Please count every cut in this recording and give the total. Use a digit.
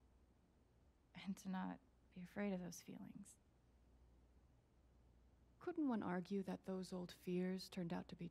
3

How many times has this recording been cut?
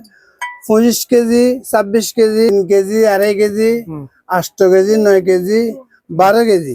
1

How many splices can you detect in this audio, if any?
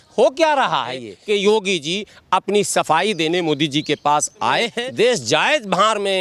2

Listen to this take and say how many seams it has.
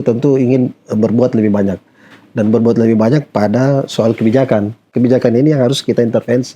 1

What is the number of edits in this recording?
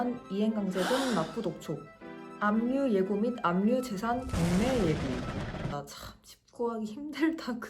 1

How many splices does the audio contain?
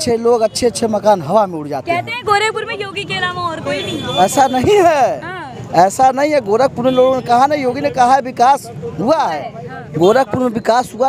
0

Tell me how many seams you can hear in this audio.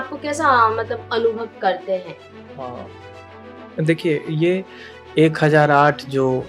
1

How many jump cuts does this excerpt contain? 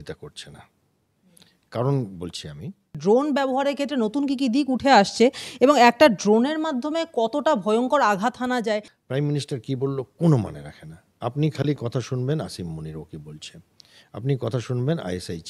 2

